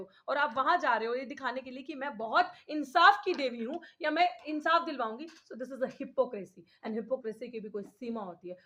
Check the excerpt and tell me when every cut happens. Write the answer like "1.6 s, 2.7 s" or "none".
none